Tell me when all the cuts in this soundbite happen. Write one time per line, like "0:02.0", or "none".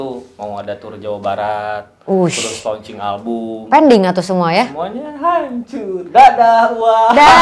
none